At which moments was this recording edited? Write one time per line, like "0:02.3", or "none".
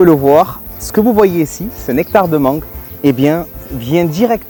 none